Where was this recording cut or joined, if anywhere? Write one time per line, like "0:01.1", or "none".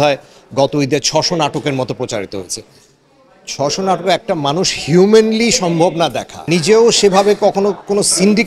0:06.3